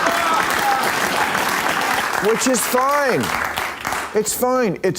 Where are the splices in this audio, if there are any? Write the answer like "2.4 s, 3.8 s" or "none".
2.0 s